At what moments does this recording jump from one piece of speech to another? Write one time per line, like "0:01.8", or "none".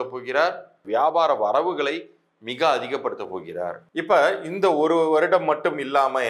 0:00.8
0:03.8